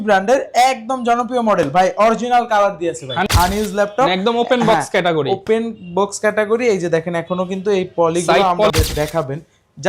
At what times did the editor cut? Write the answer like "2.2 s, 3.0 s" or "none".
3.3 s, 8.7 s